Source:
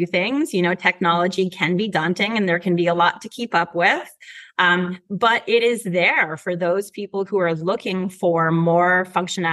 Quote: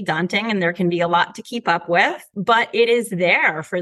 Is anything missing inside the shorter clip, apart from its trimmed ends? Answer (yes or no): yes